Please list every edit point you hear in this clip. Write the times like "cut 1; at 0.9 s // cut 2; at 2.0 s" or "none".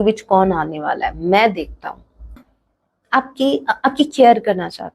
cut 1; at 2.3 s